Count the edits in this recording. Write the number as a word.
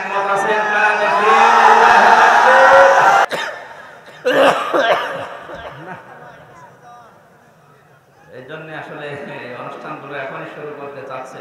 one